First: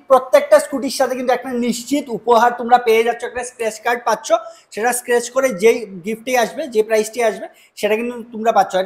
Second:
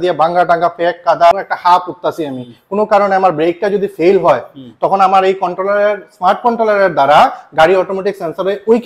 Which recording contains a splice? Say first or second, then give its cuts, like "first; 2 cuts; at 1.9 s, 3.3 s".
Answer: second; 1 cut; at 1.3 s